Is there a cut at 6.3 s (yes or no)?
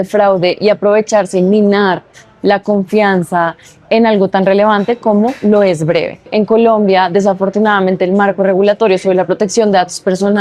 yes